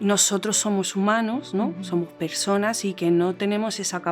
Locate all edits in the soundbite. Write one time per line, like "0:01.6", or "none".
none